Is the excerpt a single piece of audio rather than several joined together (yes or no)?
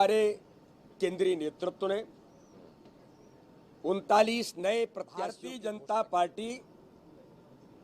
no